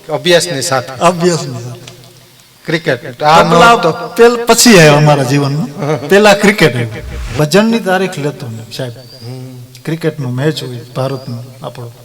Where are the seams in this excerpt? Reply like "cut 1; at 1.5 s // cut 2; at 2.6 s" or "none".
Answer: cut 1; at 7.2 s